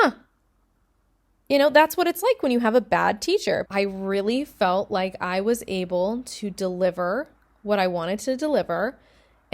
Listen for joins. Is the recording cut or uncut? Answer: cut